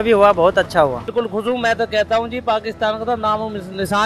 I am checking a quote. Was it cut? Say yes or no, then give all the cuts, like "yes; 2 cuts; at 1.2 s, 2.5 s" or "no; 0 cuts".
yes; 1 cut; at 1.1 s